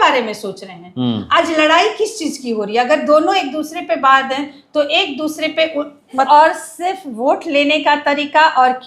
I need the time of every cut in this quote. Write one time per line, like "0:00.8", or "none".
0:06.3